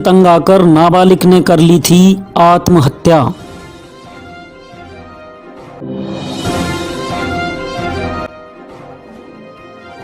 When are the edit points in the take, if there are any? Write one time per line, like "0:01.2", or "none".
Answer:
0:05.8
0:08.0

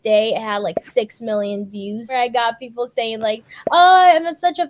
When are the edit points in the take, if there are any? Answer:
0:02.1

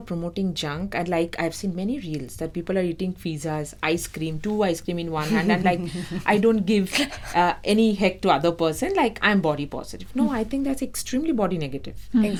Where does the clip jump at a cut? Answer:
none

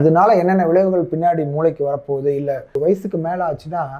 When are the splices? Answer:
0:02.8

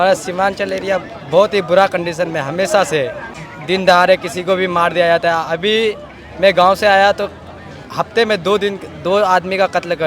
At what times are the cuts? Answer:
0:03.5

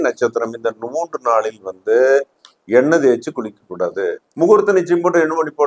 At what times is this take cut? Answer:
0:04.2

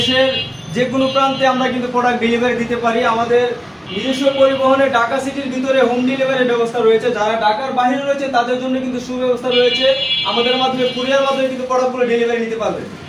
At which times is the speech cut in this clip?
none

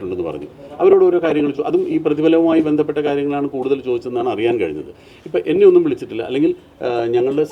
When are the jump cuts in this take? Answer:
none

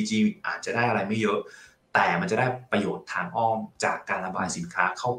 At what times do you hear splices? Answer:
none

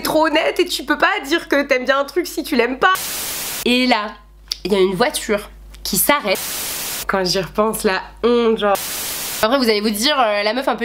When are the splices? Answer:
0:03.2
0:06.9
0:09.2

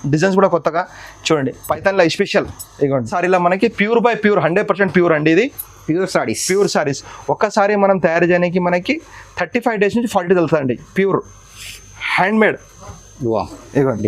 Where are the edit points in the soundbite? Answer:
0:03.1

